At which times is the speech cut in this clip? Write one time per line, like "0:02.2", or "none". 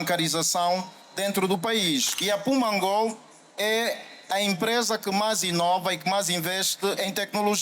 0:02.1